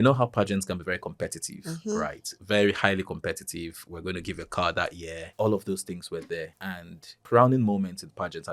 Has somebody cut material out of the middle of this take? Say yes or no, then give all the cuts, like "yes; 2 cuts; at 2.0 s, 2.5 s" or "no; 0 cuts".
yes; 2 cuts; at 5.2 s, 7.1 s